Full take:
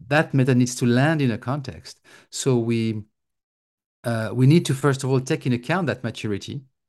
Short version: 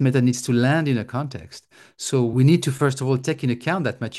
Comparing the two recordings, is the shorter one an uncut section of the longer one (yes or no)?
no